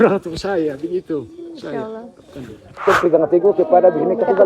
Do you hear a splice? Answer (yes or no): yes